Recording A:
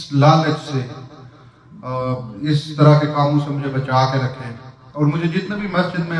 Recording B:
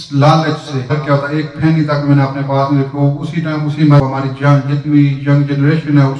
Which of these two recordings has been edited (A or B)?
B